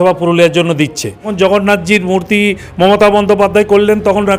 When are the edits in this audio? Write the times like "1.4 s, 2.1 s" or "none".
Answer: 1.3 s